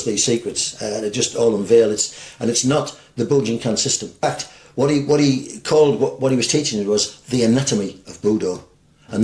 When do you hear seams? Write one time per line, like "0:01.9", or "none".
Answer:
0:04.2